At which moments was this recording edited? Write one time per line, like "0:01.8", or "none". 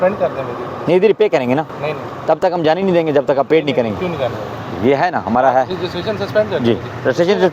none